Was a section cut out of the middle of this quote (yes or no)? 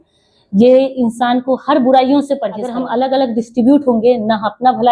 yes